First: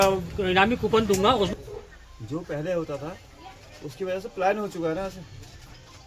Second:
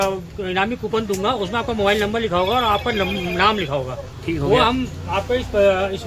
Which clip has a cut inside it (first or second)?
first